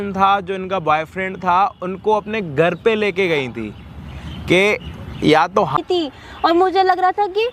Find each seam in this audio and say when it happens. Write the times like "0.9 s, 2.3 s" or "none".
5.7 s